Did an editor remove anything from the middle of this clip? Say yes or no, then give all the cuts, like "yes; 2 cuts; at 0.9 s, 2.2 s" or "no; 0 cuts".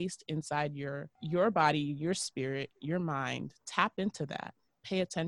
yes; 1 cut; at 1.1 s